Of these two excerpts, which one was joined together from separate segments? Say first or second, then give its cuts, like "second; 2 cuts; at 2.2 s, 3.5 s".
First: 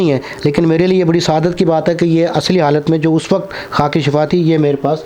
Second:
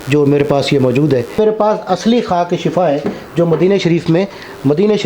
second; 1 cut; at 1.4 s